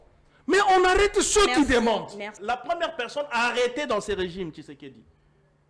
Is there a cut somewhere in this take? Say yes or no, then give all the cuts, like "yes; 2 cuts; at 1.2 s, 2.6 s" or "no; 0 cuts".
yes; 1 cut; at 2.4 s